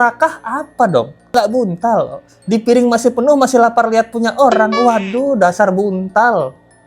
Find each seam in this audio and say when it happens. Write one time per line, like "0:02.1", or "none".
0:01.3